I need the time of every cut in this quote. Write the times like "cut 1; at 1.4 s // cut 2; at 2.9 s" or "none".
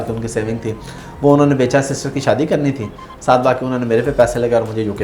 none